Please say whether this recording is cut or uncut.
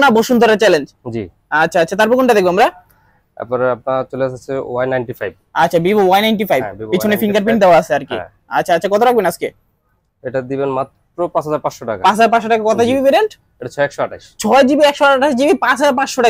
uncut